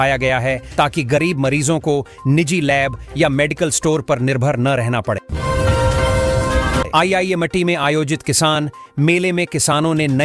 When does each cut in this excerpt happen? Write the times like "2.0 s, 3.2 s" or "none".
5.3 s, 6.9 s